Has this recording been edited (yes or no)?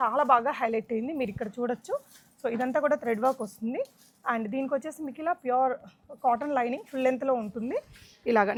no